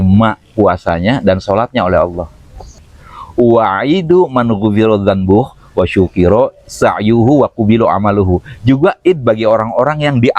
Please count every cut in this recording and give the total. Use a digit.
1